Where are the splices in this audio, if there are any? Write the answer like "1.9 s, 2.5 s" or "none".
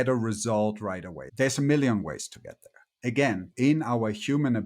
1.2 s, 3.5 s